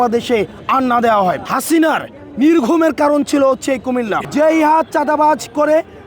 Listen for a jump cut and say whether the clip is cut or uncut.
cut